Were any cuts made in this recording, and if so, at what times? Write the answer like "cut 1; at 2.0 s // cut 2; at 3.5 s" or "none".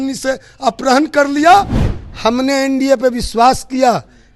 cut 1; at 1.8 s